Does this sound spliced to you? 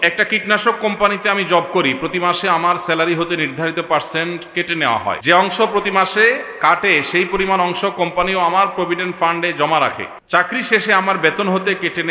yes; 2 cuts; at 5.2 s, 10.1 s

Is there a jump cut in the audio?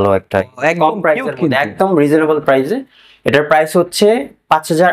no; 0 cuts

